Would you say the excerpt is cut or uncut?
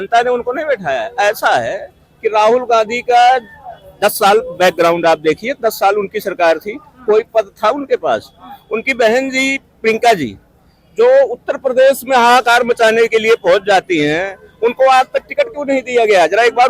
uncut